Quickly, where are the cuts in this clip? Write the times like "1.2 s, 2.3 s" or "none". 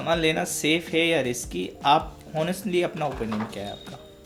none